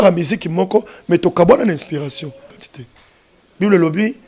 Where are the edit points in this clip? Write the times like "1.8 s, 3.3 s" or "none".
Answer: 2.6 s